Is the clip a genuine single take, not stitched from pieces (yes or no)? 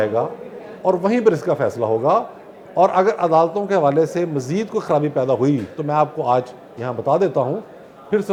yes